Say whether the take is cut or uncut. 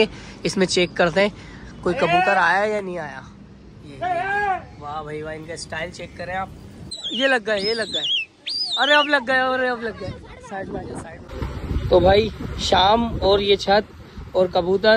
cut